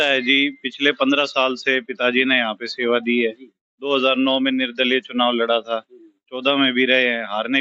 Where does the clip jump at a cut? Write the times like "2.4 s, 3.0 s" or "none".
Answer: none